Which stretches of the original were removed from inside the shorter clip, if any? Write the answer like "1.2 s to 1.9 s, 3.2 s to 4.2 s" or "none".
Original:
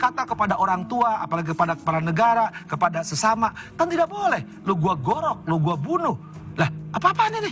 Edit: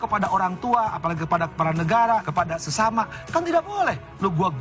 2.6 s to 2.7 s